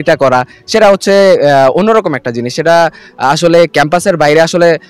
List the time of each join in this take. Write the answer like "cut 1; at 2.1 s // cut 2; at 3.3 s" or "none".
none